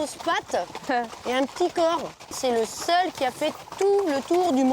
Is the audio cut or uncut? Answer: cut